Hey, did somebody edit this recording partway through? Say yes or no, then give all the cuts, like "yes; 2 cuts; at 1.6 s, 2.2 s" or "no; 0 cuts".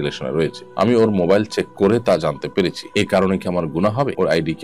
no; 0 cuts